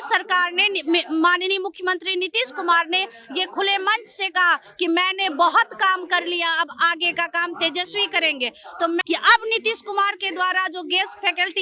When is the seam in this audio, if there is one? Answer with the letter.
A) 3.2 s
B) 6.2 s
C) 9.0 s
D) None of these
C